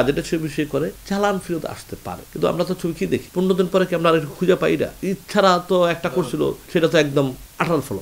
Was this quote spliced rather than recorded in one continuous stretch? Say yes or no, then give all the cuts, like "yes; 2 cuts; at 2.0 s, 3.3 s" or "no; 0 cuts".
yes; 2 cuts; at 3.3 s, 5.0 s